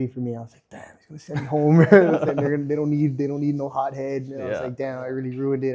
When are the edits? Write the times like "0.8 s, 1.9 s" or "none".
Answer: none